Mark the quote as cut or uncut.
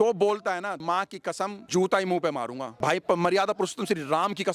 cut